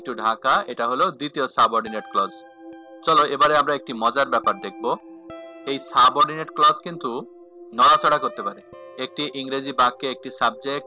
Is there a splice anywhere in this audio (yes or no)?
yes